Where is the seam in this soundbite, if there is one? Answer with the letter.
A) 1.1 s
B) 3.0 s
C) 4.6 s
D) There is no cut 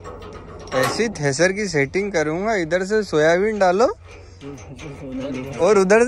D